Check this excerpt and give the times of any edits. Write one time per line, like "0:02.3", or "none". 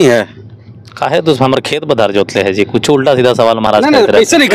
none